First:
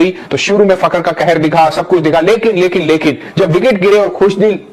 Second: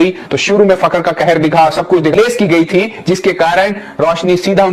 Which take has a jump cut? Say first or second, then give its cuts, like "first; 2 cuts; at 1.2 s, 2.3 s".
second; 1 cut; at 2.1 s